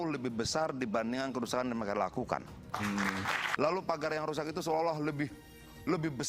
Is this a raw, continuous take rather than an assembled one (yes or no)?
no